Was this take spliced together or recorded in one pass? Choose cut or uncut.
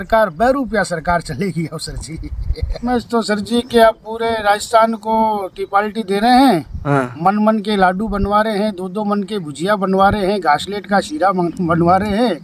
cut